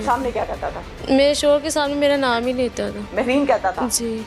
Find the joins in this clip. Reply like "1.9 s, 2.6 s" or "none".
0.9 s